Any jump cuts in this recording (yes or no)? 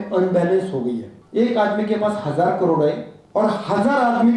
yes